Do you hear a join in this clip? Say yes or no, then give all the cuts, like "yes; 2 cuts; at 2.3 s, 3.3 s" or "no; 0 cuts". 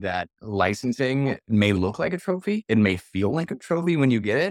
yes; 1 cut; at 2.6 s